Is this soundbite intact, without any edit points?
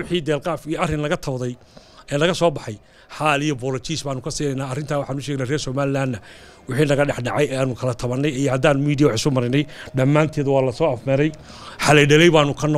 yes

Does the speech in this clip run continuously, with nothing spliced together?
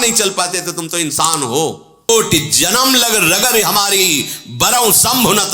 no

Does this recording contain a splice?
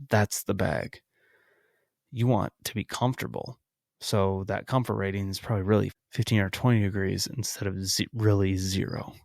yes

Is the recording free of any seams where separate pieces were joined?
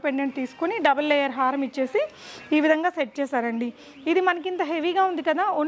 yes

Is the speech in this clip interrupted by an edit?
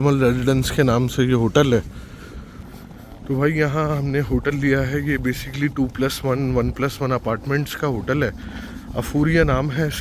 no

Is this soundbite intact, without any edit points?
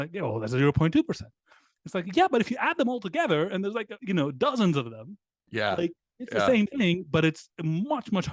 yes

